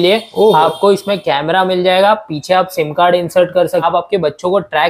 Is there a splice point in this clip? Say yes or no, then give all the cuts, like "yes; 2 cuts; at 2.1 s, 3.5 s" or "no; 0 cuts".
yes; 1 cut; at 3.9 s